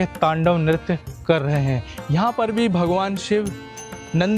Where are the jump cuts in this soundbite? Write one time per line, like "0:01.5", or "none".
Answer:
0:01.9